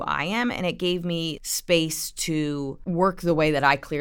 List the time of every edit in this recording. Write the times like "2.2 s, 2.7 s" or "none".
1.4 s, 2.8 s